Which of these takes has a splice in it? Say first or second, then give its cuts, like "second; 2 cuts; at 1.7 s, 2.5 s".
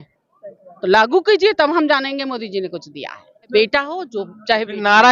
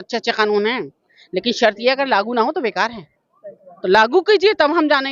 first; 1 cut; at 3.5 s